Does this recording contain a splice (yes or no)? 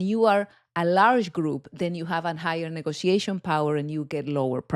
no